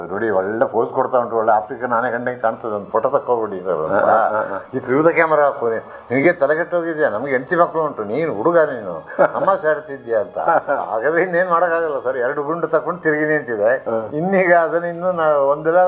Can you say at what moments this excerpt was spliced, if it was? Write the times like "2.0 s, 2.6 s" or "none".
10.4 s